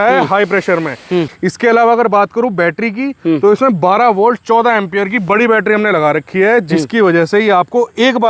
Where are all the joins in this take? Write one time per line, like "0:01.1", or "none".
0:01.3